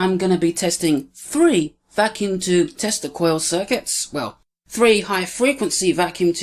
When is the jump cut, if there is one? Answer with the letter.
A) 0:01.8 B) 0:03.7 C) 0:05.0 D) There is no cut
B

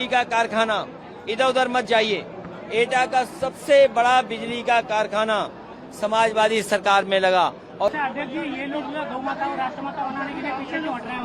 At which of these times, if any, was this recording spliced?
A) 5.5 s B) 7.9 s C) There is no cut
B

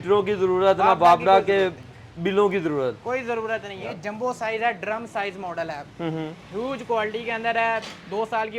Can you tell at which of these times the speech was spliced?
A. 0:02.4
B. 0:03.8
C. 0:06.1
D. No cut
B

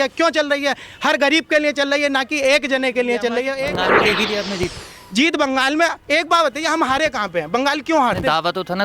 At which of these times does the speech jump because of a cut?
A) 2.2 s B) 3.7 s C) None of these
B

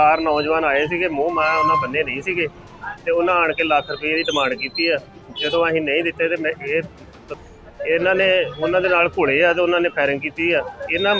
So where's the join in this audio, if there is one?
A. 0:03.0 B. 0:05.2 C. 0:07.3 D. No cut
C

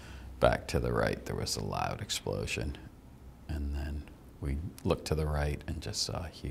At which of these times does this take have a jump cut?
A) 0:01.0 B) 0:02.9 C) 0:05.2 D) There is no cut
D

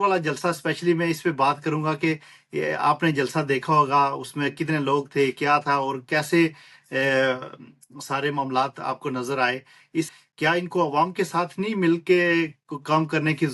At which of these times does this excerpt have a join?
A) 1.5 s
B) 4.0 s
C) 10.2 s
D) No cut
C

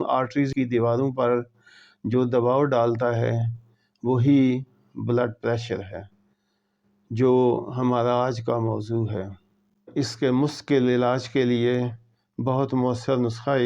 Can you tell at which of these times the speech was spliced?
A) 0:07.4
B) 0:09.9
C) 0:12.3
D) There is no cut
B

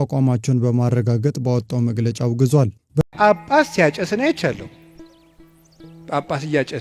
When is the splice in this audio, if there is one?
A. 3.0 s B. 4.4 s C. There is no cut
A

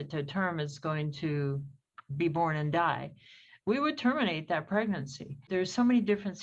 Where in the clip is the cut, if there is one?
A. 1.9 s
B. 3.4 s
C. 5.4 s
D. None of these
C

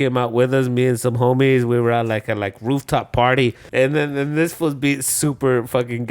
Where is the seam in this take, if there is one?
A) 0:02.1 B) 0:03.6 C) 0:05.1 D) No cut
B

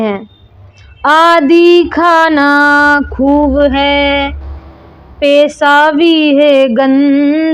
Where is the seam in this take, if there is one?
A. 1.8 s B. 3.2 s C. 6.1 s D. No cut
D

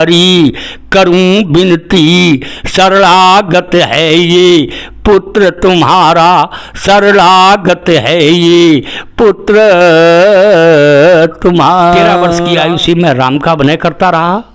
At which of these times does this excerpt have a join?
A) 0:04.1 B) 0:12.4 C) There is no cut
B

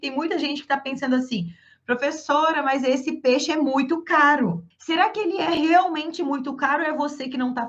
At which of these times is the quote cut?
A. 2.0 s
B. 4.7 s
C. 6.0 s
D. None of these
B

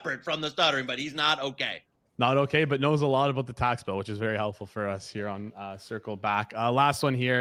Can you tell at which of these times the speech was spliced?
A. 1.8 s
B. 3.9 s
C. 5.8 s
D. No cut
D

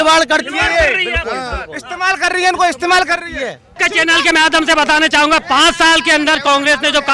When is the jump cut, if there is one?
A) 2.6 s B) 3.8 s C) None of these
B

